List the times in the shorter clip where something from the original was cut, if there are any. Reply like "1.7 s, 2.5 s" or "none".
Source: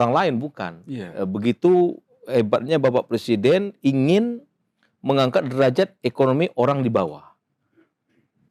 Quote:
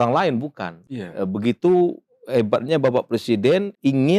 none

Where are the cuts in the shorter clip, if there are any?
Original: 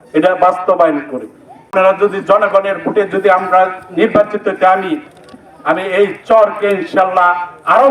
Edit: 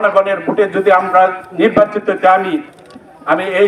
none

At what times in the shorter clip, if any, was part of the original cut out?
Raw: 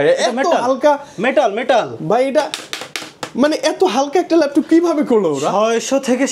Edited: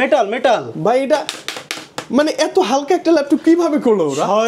none

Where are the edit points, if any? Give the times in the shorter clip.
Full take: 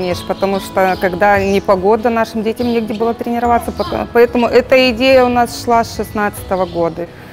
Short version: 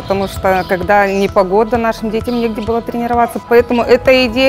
3.4 s

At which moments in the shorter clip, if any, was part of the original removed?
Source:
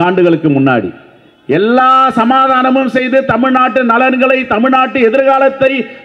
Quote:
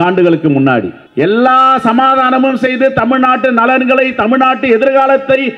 1.0 s

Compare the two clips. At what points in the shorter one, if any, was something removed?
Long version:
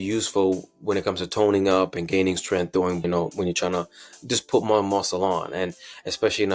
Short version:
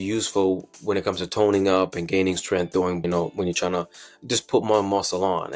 none

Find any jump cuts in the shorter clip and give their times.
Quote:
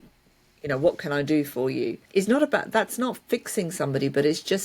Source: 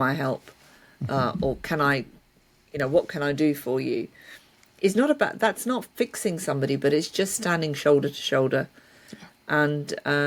2.0 s

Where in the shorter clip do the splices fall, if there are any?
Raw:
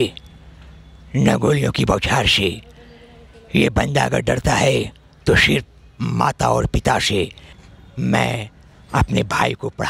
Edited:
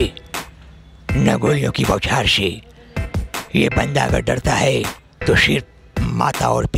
none

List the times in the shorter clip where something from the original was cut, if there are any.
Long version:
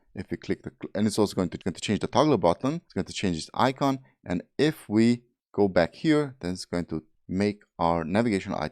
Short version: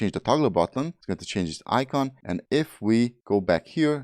2.4 s, 3.2 s

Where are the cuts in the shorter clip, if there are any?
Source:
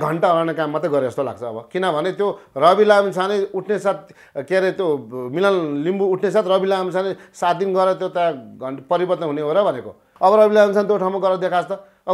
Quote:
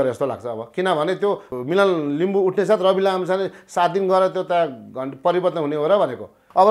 1.5 s

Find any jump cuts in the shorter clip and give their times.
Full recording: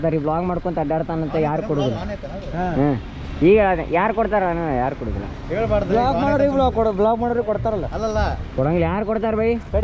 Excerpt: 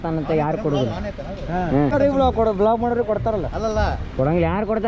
1.9 s

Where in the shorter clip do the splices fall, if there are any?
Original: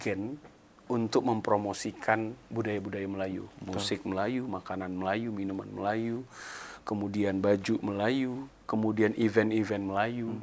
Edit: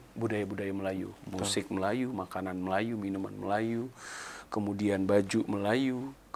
none

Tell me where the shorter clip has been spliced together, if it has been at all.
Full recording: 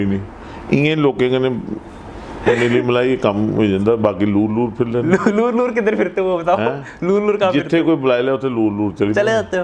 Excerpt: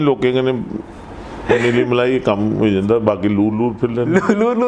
none

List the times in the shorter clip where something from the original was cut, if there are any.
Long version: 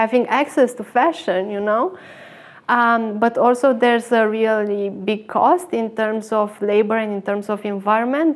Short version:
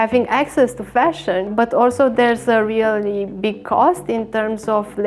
1.5 s

